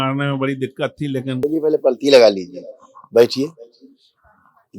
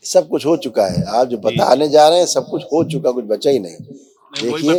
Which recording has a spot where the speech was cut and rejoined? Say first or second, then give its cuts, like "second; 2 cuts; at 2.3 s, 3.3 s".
first; 1 cut; at 1.4 s